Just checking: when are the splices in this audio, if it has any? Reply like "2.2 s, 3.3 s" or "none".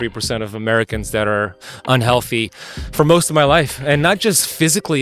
none